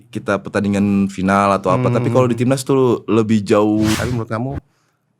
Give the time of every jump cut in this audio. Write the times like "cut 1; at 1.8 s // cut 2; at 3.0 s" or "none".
cut 1; at 3.9 s